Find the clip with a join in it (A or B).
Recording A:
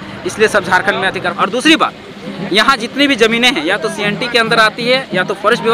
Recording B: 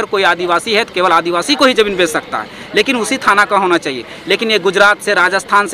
A